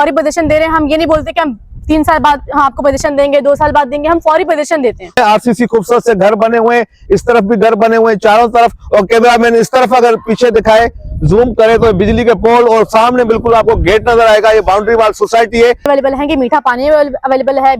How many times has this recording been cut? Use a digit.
2